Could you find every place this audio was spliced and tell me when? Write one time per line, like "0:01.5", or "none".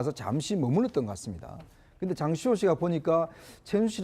0:01.1